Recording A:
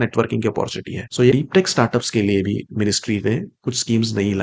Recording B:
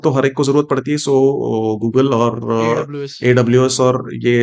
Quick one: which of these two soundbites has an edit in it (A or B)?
A